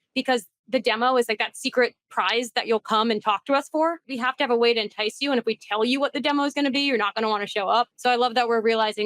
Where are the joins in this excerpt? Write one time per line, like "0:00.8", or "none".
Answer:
0:04.2
0:07.9